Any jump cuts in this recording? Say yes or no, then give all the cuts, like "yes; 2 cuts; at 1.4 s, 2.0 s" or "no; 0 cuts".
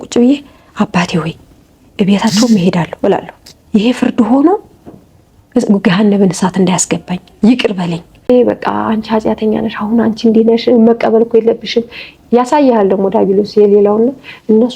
yes; 1 cut; at 8.3 s